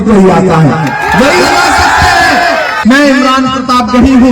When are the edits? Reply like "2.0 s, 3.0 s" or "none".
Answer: 2.8 s